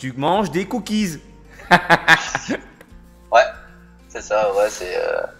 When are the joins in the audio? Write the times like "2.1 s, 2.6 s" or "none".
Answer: none